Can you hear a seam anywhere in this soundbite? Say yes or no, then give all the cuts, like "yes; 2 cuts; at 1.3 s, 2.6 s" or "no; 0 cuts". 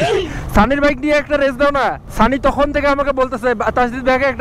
yes; 1 cut; at 2.0 s